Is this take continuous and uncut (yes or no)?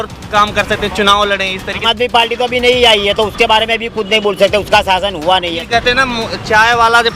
no